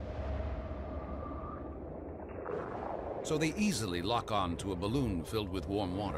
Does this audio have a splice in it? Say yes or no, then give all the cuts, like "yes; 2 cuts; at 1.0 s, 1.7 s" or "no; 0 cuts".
yes; 1 cut; at 4.9 s